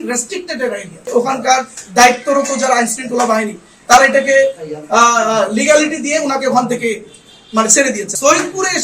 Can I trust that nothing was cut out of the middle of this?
no; 1 cut; at 1.1 s

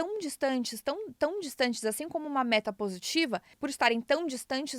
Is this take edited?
yes; 1 cut; at 3.6 s

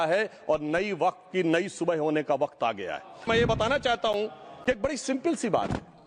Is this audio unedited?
no; 1 cut; at 3.3 s

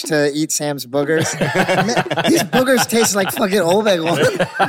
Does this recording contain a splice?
no; 0 cuts

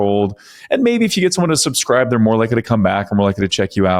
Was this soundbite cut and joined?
no; 0 cuts

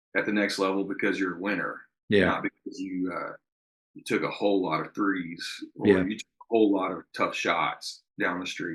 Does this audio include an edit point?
no; 0 cuts

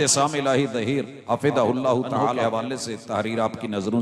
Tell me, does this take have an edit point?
yes; 2 cuts; at 1.1 s, 2.4 s

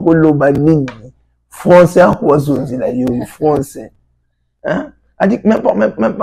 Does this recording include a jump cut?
no; 0 cuts

